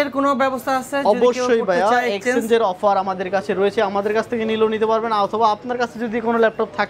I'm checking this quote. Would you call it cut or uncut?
uncut